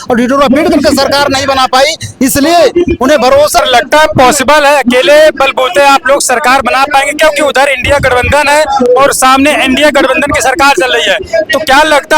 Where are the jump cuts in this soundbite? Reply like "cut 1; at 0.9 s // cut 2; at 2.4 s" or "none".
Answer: cut 1; at 3.6 s